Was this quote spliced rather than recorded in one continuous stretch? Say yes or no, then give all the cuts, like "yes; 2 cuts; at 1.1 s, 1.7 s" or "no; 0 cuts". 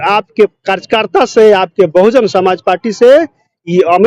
no; 0 cuts